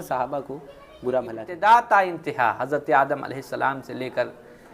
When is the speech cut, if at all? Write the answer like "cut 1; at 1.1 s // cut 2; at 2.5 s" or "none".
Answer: cut 1; at 1.4 s

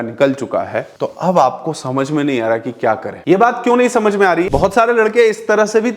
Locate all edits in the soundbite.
cut 1; at 4.5 s

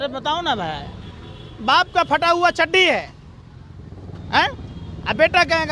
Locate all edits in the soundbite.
none

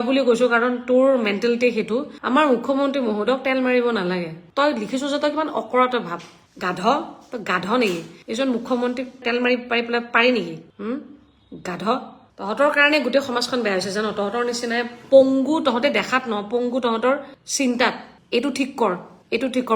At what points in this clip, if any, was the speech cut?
cut 1; at 2.1 s

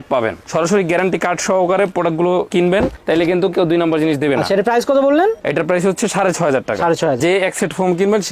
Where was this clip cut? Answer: cut 1; at 7.2 s

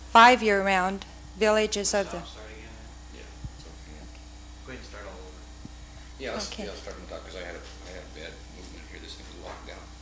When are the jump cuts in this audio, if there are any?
cut 1; at 4.0 s

